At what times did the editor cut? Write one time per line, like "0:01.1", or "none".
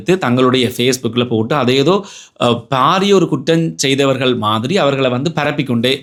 none